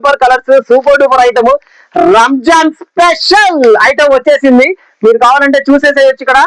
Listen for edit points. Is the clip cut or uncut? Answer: uncut